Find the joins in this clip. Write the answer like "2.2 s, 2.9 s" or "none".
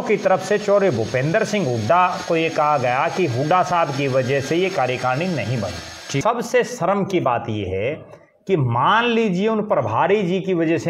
6.2 s